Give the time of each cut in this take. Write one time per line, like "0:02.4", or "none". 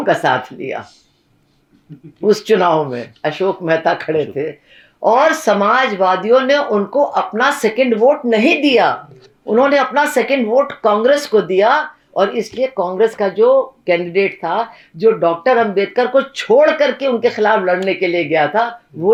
none